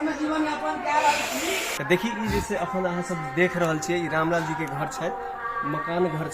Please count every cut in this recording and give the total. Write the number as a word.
one